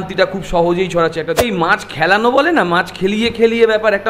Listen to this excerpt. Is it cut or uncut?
cut